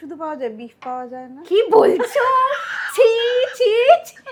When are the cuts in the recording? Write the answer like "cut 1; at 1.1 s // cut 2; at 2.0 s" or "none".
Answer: none